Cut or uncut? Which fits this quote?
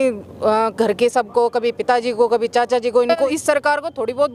cut